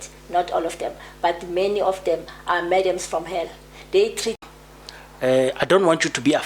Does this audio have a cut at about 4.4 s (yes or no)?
yes